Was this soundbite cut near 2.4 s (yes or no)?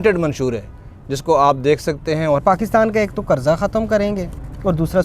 yes